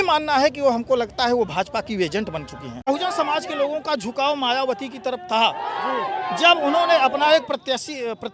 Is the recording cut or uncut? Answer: cut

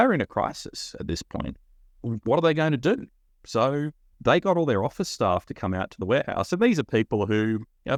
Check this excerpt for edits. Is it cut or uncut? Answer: uncut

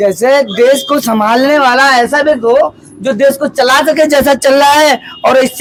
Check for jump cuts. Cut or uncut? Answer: uncut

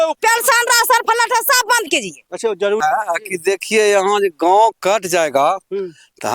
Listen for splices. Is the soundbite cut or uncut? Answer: cut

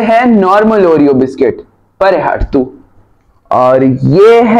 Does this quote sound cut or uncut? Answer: uncut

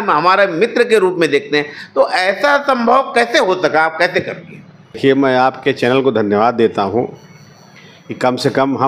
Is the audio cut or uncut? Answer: uncut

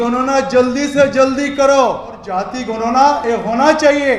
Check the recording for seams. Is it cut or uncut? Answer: cut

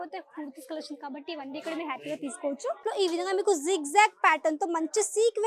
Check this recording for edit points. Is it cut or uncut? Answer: cut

